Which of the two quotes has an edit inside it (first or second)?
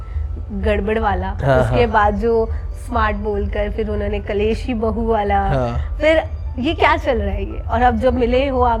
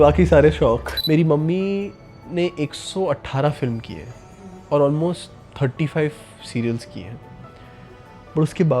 second